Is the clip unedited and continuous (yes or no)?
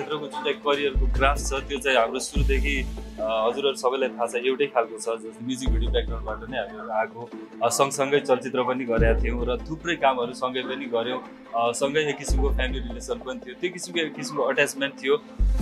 yes